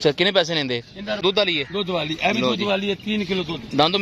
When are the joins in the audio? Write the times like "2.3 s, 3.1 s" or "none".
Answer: 1.2 s